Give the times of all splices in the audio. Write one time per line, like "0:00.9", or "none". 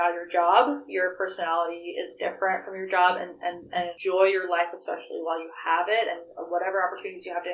0:03.9